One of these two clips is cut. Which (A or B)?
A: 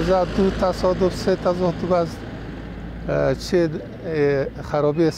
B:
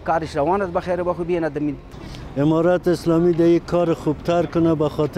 B